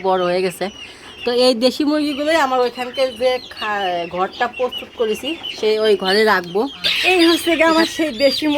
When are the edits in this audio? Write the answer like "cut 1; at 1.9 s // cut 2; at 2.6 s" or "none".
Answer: cut 1; at 6.9 s